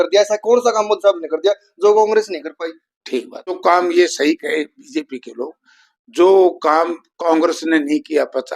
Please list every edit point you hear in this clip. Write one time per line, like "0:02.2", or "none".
0:03.4